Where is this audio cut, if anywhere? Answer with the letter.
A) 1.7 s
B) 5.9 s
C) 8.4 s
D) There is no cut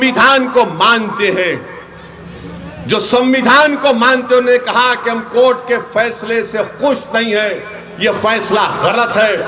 D